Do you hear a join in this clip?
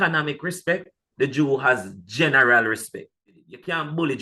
yes; 1 cut; at 3.2 s

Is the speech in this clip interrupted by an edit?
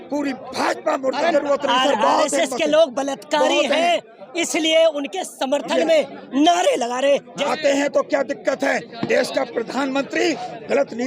yes; 2 cuts; at 1.3 s, 7.4 s

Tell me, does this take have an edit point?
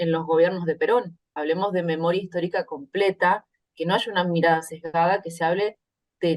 yes; 1 cut; at 1.4 s

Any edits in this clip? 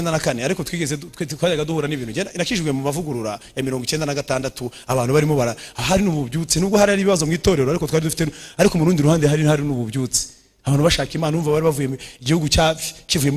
no; 0 cuts

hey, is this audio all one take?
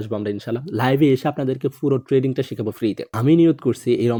yes; 0 cuts

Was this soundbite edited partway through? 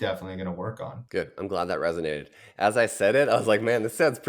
yes; 1 cut; at 0.9 s

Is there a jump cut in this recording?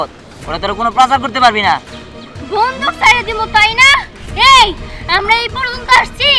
no; 0 cuts

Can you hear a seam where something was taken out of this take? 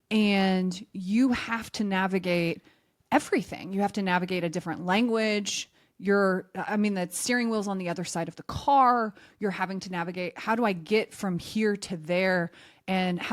no; 0 cuts

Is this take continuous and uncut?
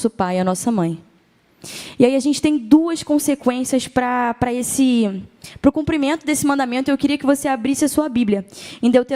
yes; 0 cuts

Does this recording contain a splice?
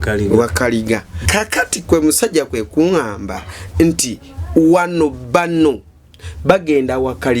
yes; 1 cut; at 1.2 s

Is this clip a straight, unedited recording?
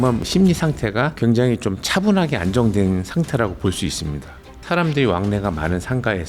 no; 1 cut; at 4.6 s

